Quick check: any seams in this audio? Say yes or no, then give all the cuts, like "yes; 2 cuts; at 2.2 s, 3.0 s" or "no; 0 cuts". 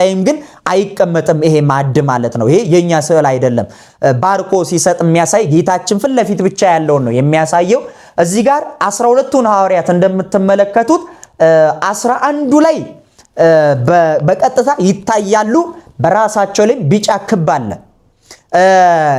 no; 0 cuts